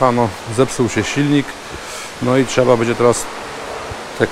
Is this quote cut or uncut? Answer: uncut